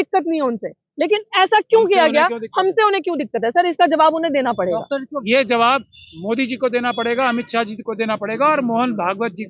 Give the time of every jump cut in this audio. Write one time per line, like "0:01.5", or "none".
0:05.1

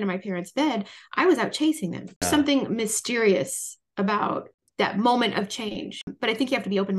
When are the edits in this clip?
0:02.2
0:04.6
0:06.1

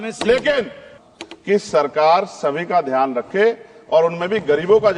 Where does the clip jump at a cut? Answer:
0:00.9

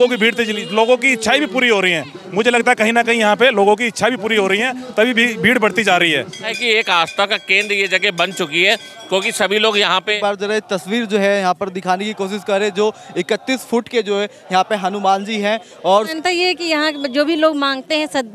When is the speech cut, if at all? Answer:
0:06.5
0:10.2
0:16.1

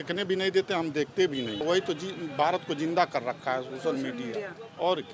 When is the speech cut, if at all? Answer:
0:01.6

